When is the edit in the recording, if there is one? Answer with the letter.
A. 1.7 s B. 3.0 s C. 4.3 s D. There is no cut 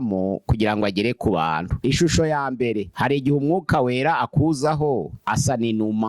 A